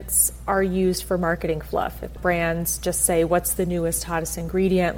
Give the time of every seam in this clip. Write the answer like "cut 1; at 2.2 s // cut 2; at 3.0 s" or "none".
cut 1; at 2.1 s